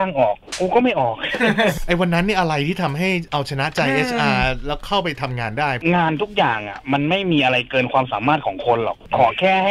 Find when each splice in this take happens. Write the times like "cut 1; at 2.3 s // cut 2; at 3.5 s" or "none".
cut 1; at 1.8 s // cut 2; at 5.8 s